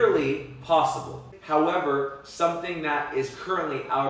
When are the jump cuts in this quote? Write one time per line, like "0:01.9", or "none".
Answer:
0:01.3